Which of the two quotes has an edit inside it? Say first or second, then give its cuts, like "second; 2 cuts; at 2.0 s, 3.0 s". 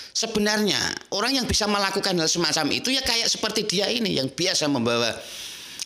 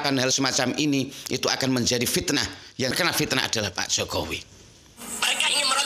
second; 1 cut; at 4.9 s